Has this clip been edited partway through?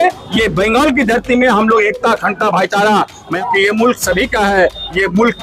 yes; 1 cut; at 3.4 s

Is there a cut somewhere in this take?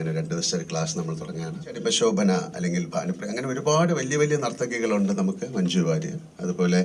yes; 1 cut; at 1.8 s

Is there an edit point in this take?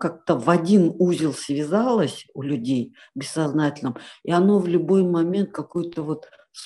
no; 0 cuts

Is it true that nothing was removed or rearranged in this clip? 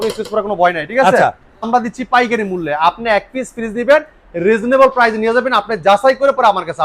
no; 1 cut; at 1.7 s

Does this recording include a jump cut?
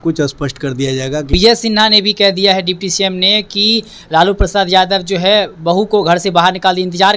yes; 1 cut; at 1.3 s

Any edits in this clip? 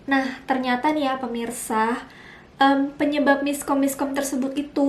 no; 0 cuts

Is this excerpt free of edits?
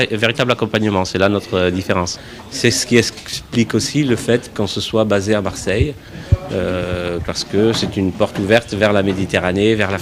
yes; 0 cuts

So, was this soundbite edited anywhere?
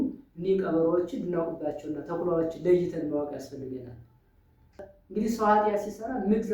yes; 1 cut; at 4.8 s

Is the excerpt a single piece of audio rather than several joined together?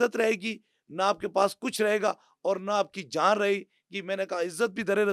yes; 0 cuts

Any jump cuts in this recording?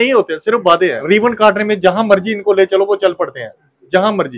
yes; 1 cut; at 1.0 s

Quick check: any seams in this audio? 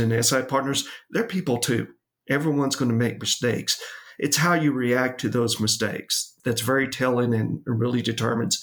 yes; 1 cut; at 6.3 s

